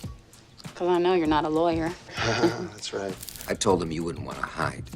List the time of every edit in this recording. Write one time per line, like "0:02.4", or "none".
0:03.3

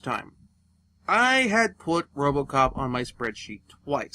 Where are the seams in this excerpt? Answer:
0:02.5

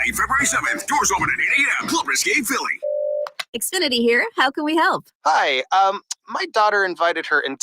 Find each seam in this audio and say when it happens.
0:02.8

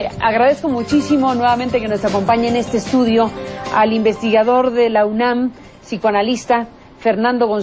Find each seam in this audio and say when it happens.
none

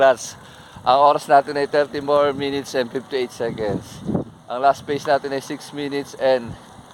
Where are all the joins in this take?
none

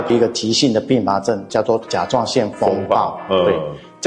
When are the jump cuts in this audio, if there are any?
0:01.4

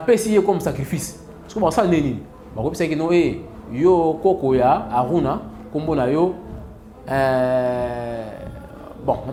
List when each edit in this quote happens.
none

